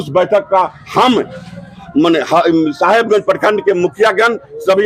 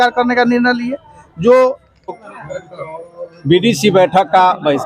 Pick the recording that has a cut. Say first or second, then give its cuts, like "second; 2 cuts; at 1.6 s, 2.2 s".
second; 1 cut; at 2.1 s